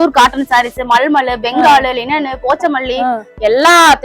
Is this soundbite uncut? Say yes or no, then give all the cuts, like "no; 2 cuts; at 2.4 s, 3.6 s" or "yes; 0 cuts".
yes; 0 cuts